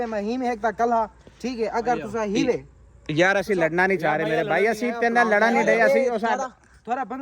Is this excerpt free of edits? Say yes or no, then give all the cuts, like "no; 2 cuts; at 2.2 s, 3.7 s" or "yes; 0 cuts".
yes; 0 cuts